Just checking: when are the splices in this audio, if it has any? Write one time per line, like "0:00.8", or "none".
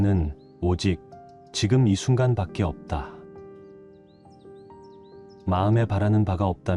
0:03.1
0:05.4